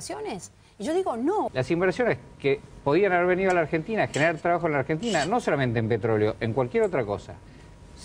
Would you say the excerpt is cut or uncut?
uncut